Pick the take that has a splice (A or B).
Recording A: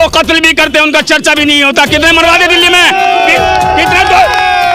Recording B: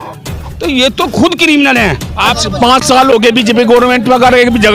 B